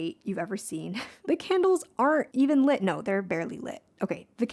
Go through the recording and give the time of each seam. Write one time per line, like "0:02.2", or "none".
0:01.1
0:02.3